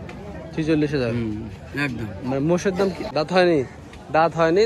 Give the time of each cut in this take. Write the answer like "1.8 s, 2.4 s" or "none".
3.0 s